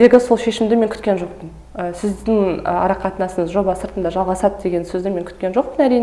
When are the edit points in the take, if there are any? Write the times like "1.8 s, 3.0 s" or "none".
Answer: none